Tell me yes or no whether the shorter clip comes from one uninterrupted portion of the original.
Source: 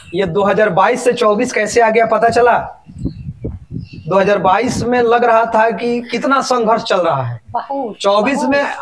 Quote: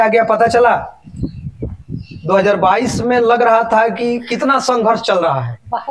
yes